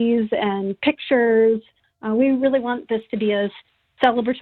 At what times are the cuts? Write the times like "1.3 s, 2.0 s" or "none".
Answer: none